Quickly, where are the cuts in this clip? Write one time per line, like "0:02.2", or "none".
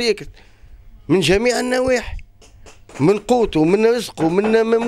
none